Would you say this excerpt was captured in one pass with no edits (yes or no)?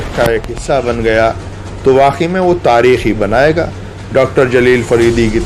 yes